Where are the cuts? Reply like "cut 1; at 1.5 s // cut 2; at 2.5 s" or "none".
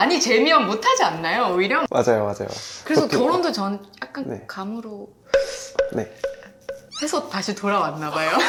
none